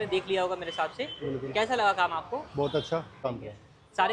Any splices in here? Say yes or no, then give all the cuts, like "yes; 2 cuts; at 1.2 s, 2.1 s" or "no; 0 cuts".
yes; 1 cut; at 3.2 s